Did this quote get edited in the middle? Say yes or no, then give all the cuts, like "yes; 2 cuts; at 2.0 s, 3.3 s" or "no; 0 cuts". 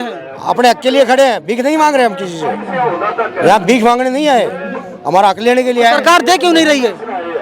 no; 0 cuts